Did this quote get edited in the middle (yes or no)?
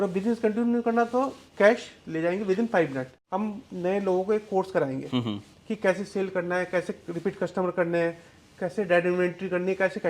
yes